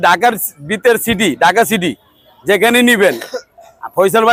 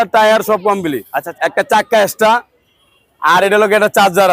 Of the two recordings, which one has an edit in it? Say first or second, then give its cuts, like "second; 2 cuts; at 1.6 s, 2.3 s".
second; 1 cut; at 1.2 s